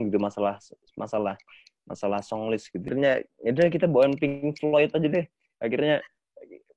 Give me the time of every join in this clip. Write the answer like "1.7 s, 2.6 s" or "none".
2.9 s